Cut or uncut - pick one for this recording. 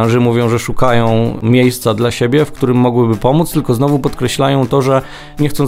cut